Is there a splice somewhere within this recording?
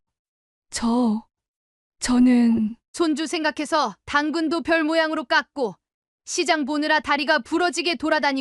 no; 0 cuts

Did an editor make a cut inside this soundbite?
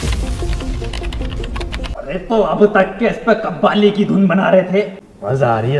no; 0 cuts

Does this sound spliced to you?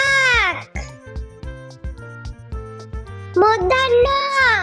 yes; 2 cuts; at 1.0 s, 3.3 s

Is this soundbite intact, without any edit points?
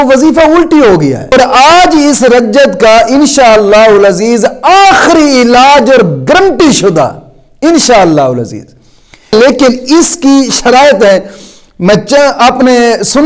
no; 2 cuts; at 1.3 s, 9.3 s

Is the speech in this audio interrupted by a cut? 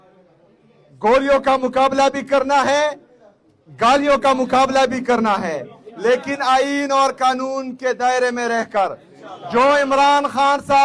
no; 0 cuts

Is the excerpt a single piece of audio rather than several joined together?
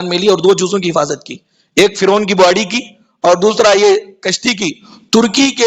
yes; 0 cuts

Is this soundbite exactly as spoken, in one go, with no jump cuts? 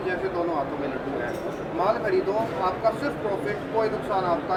yes; 0 cuts

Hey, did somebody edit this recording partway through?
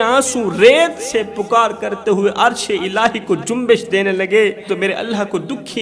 yes; 1 cut; at 4.6 s

